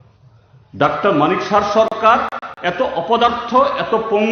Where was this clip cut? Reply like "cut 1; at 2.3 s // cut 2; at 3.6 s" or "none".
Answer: none